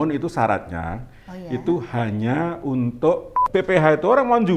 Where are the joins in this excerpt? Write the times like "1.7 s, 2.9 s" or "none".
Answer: 3.3 s